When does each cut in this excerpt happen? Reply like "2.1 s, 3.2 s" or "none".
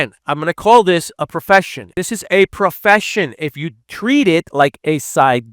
1.8 s